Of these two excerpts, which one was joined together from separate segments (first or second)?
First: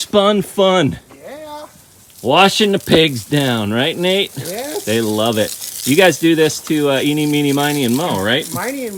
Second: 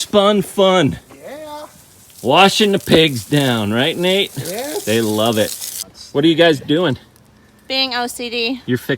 second